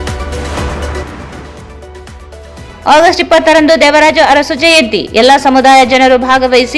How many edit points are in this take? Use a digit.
1